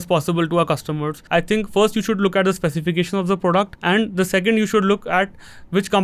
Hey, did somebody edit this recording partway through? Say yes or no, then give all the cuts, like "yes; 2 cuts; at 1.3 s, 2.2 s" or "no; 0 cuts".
yes; 2 cuts; at 1.1 s, 3.7 s